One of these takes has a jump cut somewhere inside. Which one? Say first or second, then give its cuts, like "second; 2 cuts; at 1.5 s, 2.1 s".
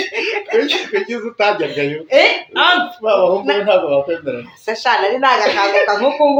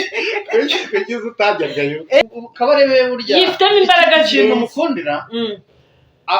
second; 1 cut; at 2.2 s